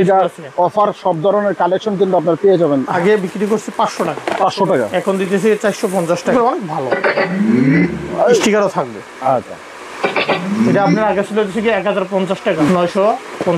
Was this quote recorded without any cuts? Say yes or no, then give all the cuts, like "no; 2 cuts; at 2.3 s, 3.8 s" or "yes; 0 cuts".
no; 4 cuts; at 2.9 s, 6.3 s, 8.4 s, 12.7 s